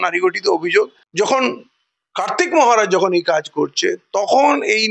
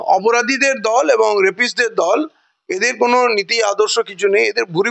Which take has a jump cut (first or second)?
first